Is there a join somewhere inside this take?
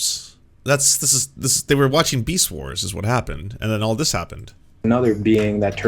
no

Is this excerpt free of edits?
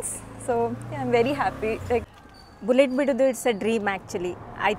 yes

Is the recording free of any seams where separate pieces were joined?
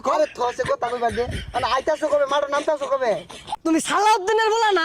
no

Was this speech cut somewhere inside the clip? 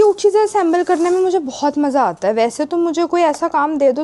no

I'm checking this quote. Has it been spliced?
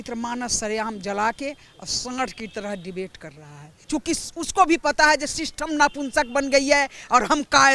yes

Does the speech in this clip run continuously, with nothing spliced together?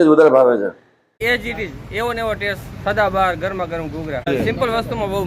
no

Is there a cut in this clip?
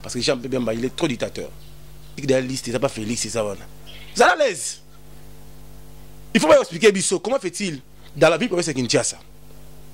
yes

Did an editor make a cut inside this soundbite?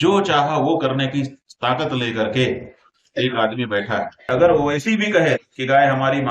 yes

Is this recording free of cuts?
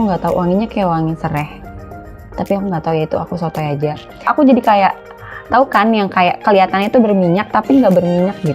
no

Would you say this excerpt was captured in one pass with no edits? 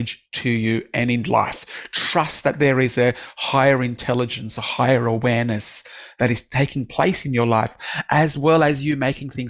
yes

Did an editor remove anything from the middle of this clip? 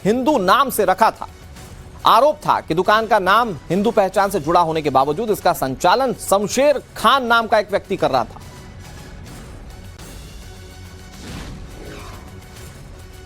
yes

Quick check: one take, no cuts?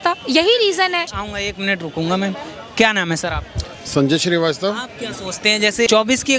yes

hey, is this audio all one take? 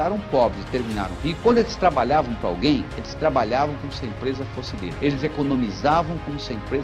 yes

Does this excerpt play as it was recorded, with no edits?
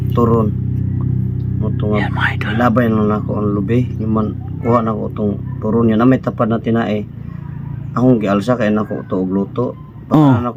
yes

